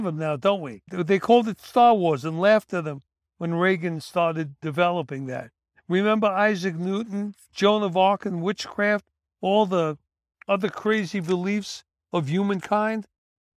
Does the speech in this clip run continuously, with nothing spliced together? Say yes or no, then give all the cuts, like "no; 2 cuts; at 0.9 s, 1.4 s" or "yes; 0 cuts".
yes; 0 cuts